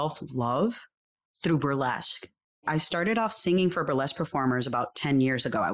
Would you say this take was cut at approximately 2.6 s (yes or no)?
yes